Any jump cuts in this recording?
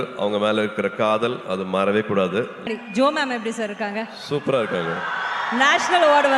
yes; 1 cut; at 2.7 s

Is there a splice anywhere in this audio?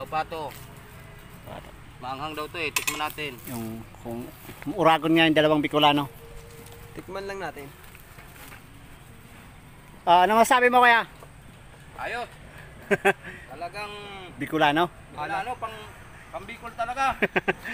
no; 0 cuts

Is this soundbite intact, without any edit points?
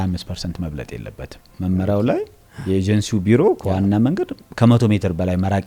no; 1 cut; at 1.5 s

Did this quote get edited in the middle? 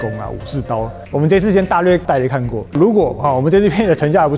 no; 0 cuts

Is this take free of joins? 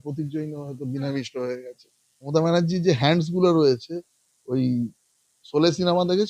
no; 1 cut; at 2.3 s

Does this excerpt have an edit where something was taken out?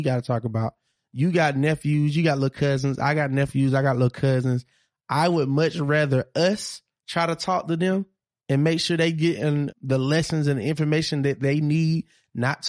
yes; 1 cut; at 9.7 s

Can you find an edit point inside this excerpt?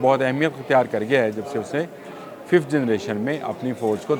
no; 0 cuts

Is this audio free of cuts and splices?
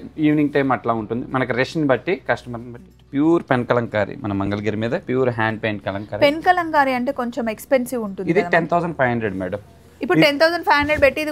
no; 1 cut; at 3.0 s

